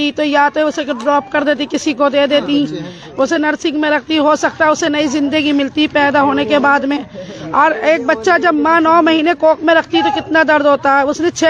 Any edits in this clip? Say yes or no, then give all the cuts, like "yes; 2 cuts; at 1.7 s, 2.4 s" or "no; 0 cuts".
no; 0 cuts